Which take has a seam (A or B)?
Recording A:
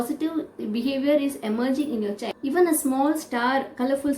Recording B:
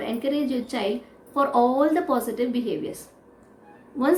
A